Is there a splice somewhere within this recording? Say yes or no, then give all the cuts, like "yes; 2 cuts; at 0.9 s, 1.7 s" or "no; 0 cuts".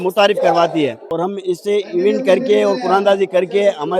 yes; 1 cut; at 1.0 s